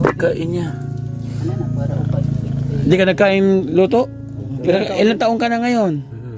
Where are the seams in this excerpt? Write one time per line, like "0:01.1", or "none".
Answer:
0:04.6